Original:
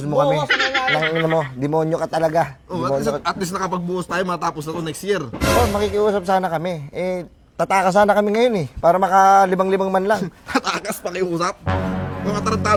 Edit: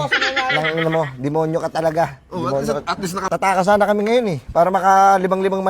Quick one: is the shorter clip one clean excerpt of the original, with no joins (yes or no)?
no